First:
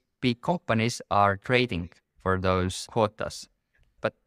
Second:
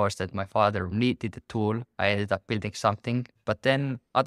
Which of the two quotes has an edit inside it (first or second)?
second